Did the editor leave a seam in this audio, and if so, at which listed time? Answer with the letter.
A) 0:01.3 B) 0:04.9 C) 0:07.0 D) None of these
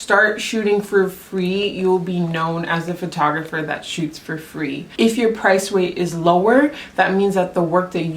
B